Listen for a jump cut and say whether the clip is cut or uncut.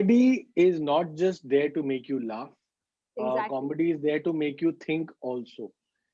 uncut